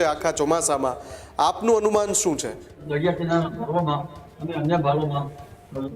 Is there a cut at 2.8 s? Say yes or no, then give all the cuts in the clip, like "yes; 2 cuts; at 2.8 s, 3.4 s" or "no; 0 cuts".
yes; 1 cut; at 2.8 s